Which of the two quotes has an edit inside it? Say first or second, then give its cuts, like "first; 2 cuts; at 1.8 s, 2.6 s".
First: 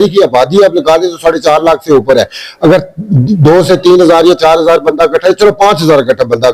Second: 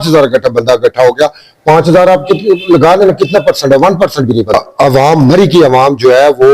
second; 1 cut; at 4.5 s